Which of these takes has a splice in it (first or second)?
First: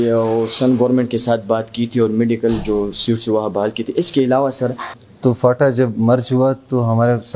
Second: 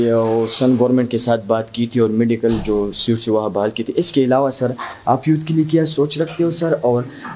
first